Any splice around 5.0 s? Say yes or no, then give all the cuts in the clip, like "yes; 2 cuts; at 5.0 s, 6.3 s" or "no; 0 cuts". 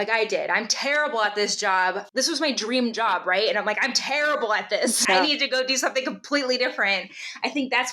yes; 2 cuts; at 2.0 s, 5.0 s